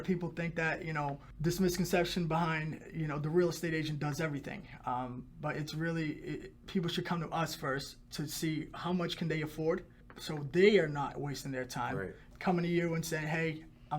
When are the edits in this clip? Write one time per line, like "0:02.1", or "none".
0:01.3
0:12.2